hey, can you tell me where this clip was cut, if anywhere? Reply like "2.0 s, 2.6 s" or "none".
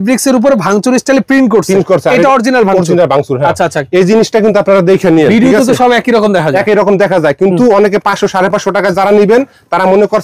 none